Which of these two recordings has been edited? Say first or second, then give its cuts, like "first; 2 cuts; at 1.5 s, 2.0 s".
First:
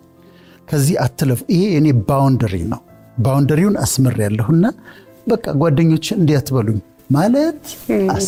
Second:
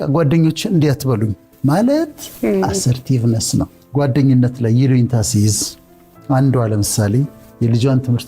second; 1 cut; at 3.8 s